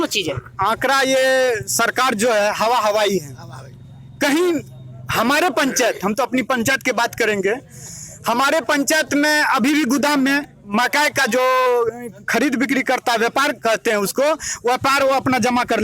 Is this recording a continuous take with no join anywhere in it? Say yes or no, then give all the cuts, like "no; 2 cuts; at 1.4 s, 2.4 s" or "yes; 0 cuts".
yes; 0 cuts